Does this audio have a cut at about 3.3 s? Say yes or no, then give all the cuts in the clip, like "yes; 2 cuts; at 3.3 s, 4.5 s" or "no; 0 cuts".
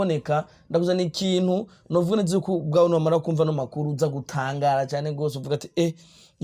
no; 0 cuts